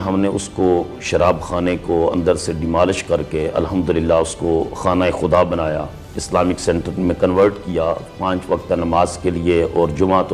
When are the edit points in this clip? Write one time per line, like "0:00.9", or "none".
none